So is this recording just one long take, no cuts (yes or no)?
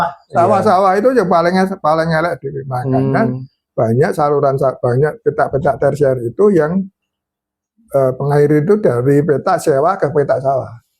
yes